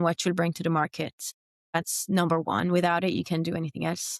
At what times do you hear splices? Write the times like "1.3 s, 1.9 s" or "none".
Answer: none